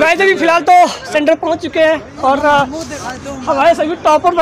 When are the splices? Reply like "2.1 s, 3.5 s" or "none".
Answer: none